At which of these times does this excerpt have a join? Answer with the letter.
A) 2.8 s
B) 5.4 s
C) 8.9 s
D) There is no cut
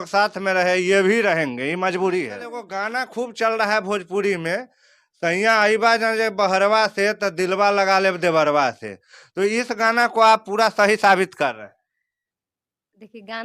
A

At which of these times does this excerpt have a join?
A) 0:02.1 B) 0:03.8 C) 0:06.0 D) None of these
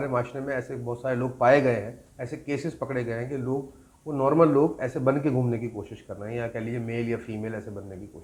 D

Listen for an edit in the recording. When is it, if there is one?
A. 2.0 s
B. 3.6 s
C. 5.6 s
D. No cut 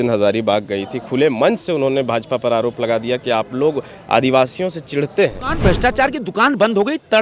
C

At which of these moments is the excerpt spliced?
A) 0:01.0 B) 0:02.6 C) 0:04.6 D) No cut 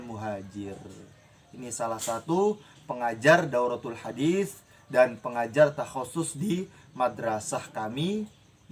D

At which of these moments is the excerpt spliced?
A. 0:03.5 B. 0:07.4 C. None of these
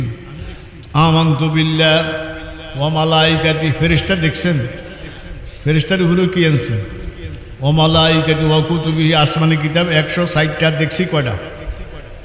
C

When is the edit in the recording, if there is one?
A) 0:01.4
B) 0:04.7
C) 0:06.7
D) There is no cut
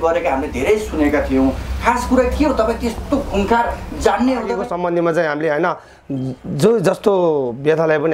B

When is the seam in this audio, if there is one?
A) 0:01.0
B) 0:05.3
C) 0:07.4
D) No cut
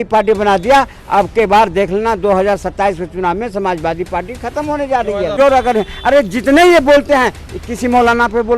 B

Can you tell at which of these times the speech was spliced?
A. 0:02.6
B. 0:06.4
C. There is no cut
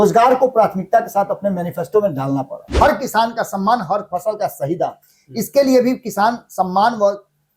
A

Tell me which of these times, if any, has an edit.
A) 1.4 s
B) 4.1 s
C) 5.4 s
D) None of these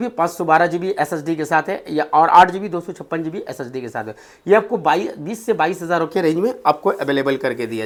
D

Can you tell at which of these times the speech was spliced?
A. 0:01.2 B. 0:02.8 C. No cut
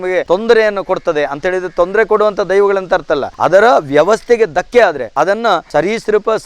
C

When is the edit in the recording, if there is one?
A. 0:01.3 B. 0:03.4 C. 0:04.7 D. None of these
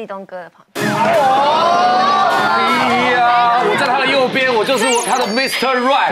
D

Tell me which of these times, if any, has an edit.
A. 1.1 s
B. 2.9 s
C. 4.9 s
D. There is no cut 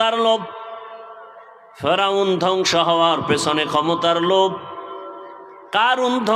D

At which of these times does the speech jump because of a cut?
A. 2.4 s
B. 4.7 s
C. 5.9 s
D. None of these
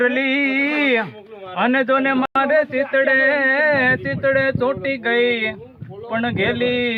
D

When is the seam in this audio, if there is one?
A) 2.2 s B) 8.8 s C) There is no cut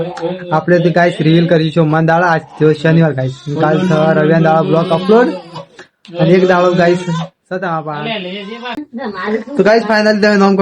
B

